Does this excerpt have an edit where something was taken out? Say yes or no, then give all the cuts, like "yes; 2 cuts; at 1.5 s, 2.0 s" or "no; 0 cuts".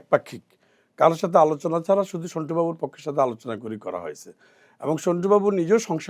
no; 0 cuts